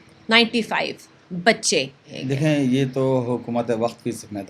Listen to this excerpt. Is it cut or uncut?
cut